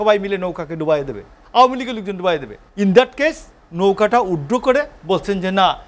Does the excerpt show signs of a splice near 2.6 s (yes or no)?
yes